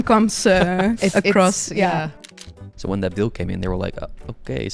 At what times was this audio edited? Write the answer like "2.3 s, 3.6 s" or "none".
2.1 s